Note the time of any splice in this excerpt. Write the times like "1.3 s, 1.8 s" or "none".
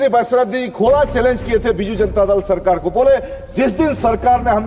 none